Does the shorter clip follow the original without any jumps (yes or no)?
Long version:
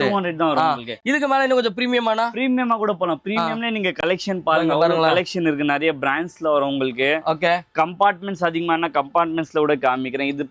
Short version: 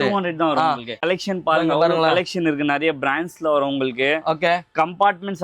no